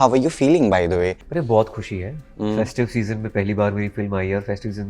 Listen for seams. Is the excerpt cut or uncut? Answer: cut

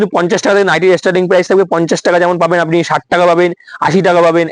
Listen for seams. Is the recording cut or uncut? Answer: uncut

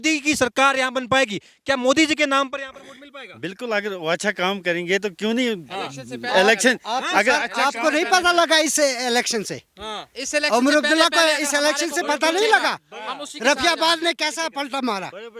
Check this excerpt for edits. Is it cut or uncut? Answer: uncut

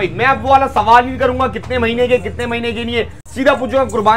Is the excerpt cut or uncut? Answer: uncut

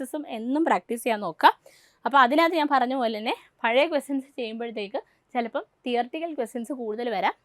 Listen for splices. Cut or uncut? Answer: uncut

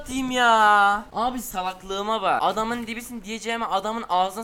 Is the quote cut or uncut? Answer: cut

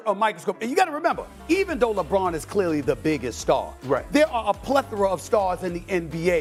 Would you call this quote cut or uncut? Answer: uncut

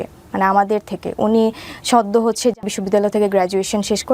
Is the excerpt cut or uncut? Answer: cut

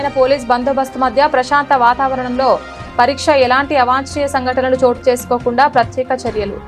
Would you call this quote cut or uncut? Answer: uncut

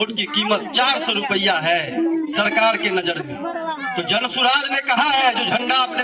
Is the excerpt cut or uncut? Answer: uncut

